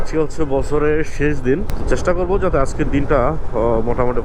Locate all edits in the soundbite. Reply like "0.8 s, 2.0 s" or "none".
none